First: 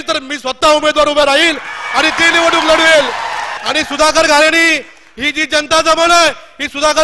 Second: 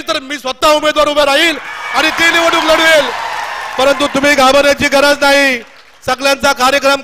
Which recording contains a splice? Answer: first; 1 cut; at 3.5 s

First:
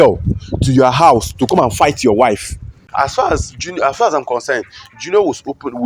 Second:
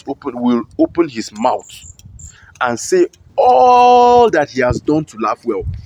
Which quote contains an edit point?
first; 1 cut; at 2.8 s

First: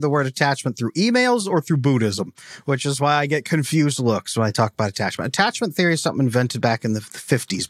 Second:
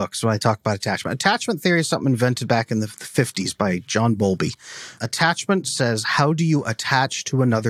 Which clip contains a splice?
second; 1 cut; at 5.0 s

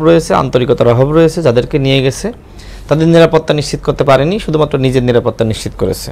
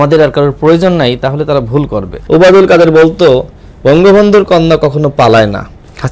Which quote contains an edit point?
second; 1 cut; at 2.1 s

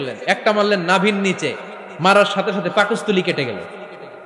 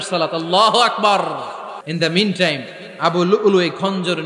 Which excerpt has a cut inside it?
second; 1 cut; at 1.8 s

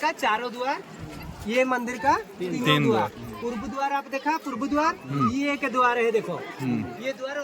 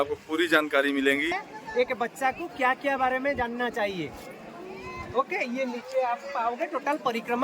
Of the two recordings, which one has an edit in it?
second; 1 cut; at 1.4 s

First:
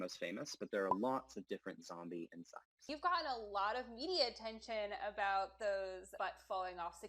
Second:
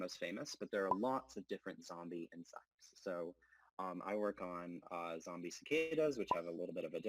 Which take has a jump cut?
first; 2 cuts; at 2.9 s, 6.1 s

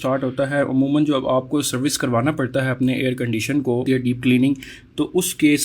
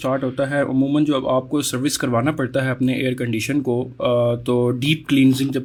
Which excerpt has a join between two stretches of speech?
first; 1 cut; at 3.8 s

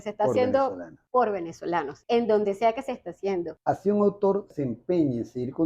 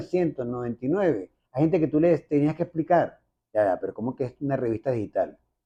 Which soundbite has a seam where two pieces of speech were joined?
first; 4 cuts; at 0.9 s, 1.9 s, 3.5 s, 4.5 s

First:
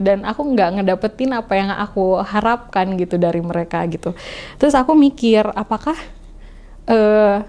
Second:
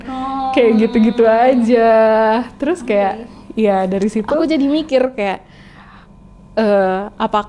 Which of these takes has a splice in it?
second; 1 cut; at 4.4 s

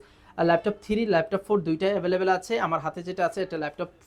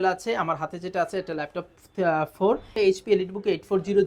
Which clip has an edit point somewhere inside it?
second; 1 cut; at 2.7 s

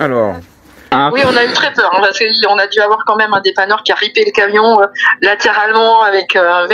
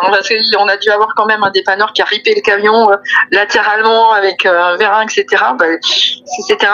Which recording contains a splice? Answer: first; 1 cut; at 0.9 s

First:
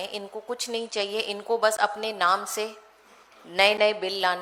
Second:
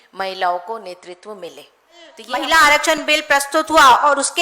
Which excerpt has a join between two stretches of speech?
second; 1 cut; at 2.2 s

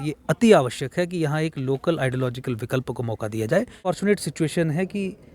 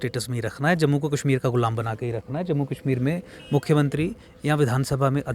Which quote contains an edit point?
first; 1 cut; at 4.0 s

